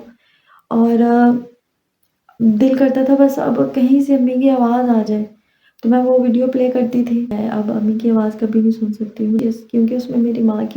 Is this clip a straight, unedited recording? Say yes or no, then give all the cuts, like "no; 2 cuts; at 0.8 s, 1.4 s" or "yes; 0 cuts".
no; 2 cuts; at 7.3 s, 9.4 s